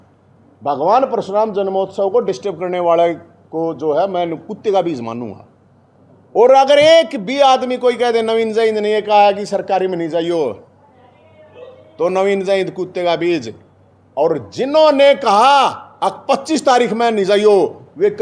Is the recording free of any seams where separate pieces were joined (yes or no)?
yes